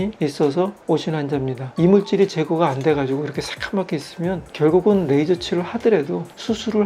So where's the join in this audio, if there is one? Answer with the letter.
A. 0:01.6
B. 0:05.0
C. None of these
A